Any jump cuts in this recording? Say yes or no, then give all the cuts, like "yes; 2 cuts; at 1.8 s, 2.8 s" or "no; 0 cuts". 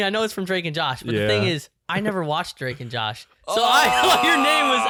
no; 0 cuts